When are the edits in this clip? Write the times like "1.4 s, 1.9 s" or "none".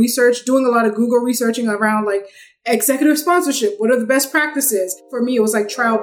5.1 s